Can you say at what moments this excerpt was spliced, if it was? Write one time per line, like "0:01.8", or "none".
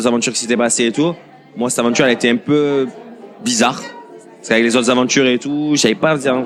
none